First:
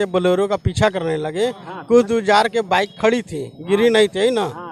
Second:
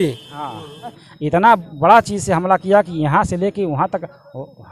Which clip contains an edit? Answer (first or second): second